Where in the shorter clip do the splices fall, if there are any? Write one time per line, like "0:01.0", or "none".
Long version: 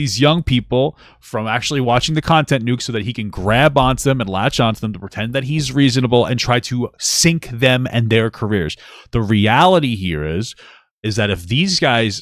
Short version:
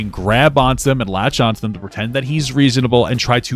none

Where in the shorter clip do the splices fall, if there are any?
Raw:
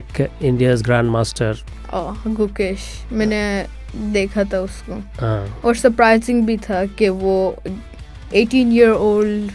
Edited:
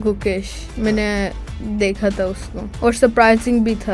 0:02.7

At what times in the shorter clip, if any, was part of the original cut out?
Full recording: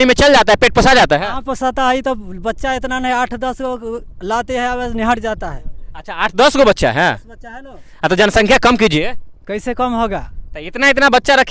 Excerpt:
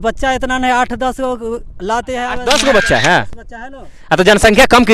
0:02.3

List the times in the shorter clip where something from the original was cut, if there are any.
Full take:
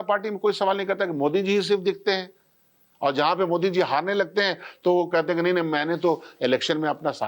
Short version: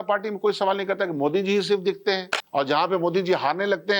0:02.3

